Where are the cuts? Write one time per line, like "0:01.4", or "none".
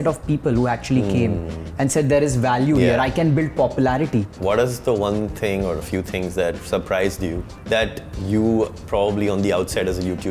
0:04.3